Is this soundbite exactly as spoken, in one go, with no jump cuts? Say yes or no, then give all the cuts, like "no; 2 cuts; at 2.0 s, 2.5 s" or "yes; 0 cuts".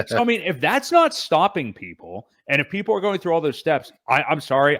yes; 0 cuts